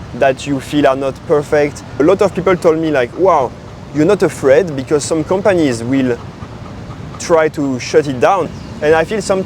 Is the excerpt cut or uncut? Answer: cut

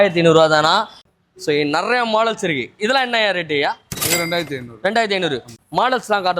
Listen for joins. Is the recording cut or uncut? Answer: cut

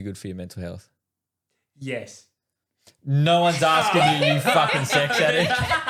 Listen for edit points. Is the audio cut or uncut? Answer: uncut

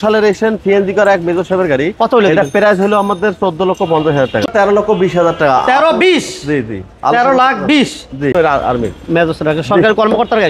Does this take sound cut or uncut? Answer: cut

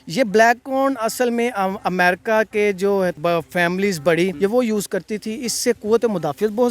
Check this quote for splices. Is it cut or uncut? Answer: cut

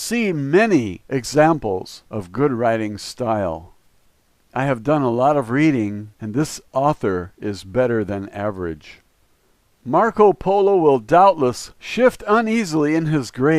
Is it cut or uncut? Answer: uncut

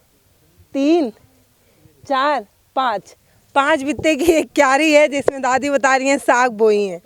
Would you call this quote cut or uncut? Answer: uncut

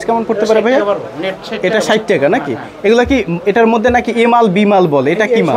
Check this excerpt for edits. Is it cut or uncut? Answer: uncut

